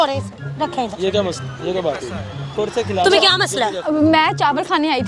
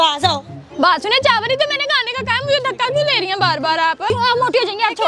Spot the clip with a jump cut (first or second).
second